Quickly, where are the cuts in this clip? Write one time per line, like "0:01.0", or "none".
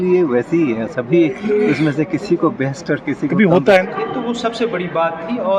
0:03.8